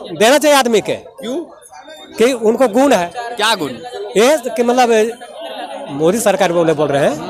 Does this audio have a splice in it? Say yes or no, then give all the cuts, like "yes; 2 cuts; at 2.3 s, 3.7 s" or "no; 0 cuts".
no; 0 cuts